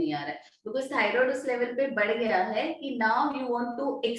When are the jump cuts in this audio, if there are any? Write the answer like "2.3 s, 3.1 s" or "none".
none